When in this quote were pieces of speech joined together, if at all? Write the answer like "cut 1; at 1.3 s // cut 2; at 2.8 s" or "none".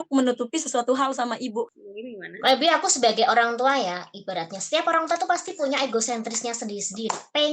cut 1; at 1.7 s